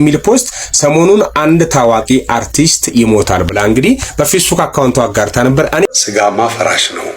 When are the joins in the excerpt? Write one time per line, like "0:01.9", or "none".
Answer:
0:05.8